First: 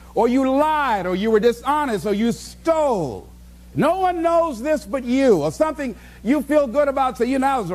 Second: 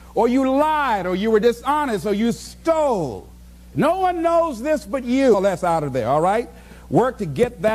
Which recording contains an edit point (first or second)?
first